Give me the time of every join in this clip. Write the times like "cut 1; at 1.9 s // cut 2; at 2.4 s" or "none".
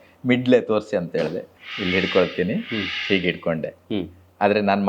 cut 1; at 1.5 s